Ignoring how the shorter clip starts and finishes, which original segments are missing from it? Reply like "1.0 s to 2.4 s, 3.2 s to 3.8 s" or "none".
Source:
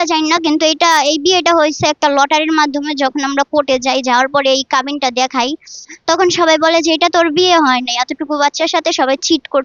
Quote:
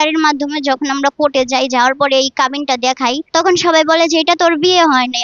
5.6 s to 6.0 s